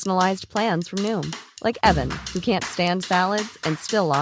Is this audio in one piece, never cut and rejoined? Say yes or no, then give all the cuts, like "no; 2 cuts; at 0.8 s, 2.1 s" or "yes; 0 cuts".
yes; 0 cuts